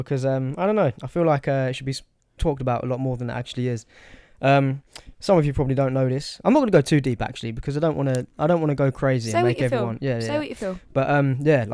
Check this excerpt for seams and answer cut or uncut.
uncut